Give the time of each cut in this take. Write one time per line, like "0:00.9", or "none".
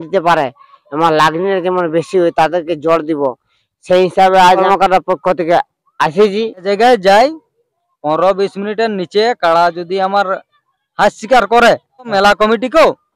0:04.6
0:06.6
0:12.1